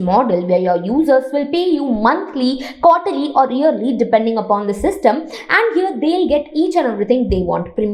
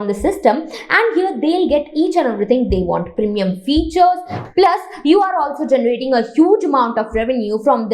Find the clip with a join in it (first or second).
second